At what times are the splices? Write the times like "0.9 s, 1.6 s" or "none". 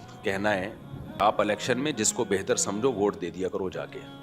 1.2 s